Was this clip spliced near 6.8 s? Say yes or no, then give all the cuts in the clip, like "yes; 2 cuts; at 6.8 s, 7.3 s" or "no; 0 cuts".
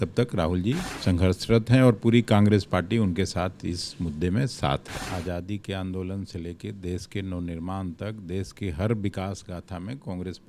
no; 2 cuts; at 0.9 s, 5.0 s